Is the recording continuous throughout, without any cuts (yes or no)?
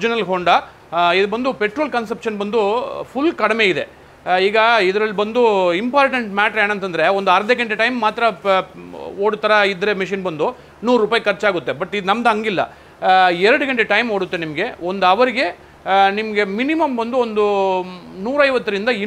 yes